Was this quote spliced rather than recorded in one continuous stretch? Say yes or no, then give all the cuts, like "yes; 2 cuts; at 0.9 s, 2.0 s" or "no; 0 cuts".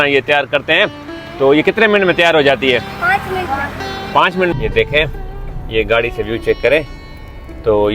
yes; 1 cut; at 4.5 s